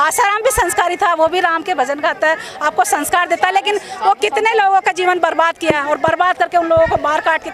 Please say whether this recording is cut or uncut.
uncut